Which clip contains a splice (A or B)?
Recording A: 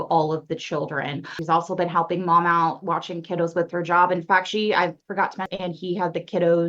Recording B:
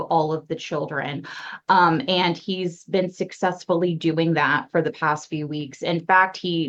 A